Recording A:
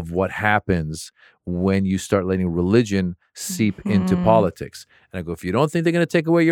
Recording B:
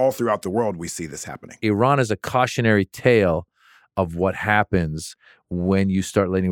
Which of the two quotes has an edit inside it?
B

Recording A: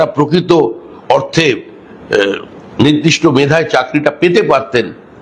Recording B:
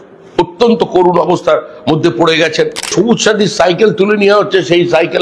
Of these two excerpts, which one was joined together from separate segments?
B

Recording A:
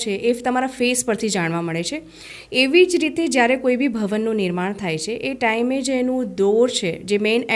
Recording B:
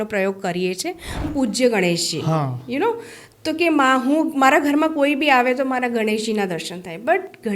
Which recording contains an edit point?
B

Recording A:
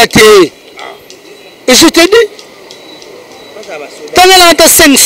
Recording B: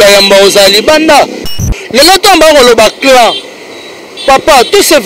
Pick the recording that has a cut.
B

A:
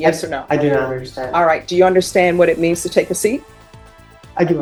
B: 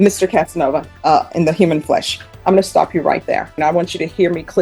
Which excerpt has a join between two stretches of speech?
B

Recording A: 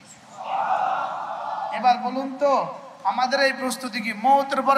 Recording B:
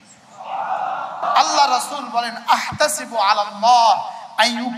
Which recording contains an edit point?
B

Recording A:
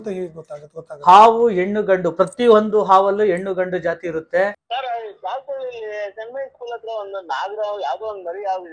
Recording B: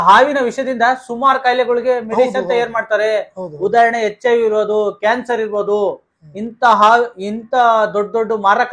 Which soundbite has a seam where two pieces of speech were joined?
A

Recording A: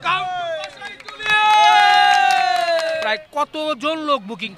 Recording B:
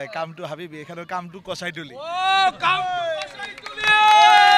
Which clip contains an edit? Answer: A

